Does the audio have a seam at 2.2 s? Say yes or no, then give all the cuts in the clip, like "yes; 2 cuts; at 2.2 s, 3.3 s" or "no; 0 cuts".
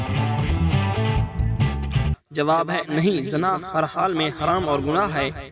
yes; 1 cut; at 2.2 s